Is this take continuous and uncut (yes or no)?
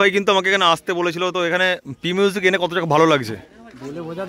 yes